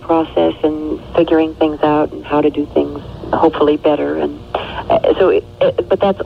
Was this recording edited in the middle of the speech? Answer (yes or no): no